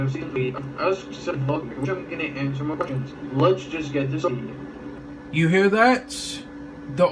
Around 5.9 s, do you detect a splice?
no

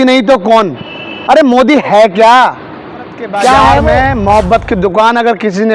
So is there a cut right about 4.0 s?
yes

